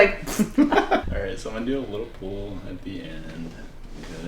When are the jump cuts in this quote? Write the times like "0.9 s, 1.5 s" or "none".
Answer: 1.1 s

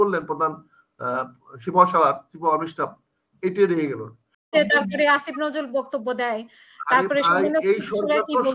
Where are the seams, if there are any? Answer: 4.5 s

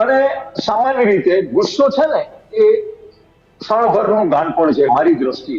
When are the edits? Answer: none

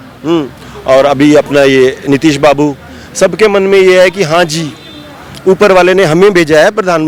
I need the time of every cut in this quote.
none

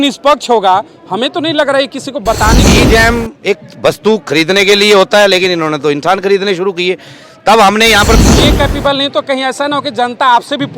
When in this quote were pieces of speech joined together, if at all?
2.6 s, 8.2 s

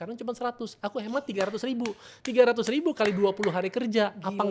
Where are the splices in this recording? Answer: none

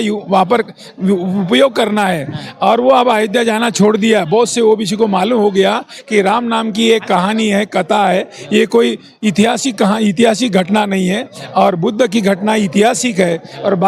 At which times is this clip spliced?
none

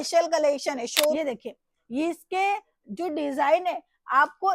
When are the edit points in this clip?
1.1 s

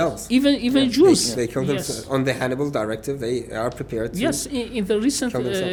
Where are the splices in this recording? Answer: none

